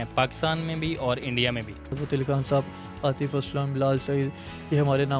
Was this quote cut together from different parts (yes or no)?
yes